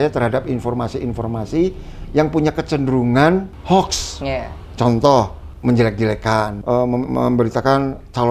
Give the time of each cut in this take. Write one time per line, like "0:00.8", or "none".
0:03.5
0:05.4
0:06.6